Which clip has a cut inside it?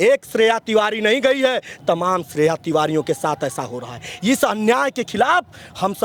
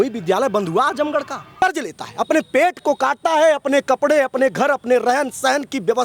second; 1 cut; at 1.6 s

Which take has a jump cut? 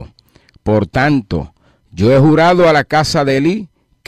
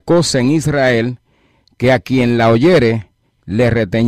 second; 1 cut; at 2.8 s

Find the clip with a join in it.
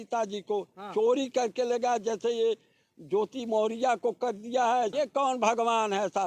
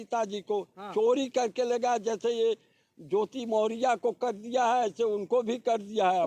first; 1 cut; at 4.9 s

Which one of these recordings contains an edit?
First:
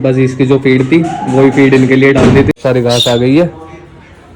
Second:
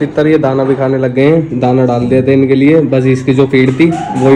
first; 1 cut; at 2.5 s

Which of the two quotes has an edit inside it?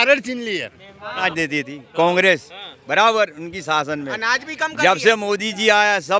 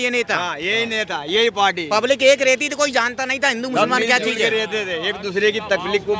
first; 1 cut; at 1.3 s

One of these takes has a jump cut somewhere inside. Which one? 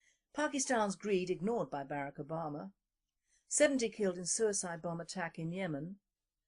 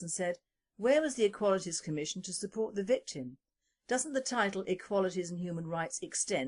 first; 1 cut; at 4.6 s

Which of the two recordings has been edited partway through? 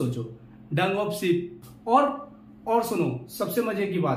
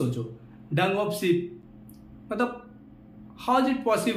first; 1 cut; at 1.7 s

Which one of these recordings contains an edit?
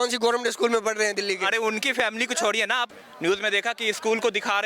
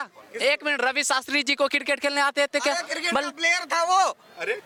first; 1 cut; at 2.9 s

